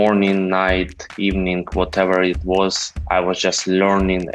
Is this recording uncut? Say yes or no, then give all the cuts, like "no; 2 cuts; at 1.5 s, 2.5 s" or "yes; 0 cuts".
yes; 0 cuts